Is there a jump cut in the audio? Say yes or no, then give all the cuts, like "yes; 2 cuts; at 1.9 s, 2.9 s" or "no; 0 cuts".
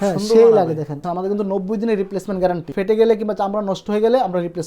yes; 2 cuts; at 1.1 s, 2.7 s